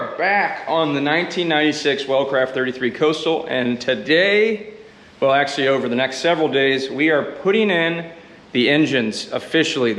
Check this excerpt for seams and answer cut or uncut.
uncut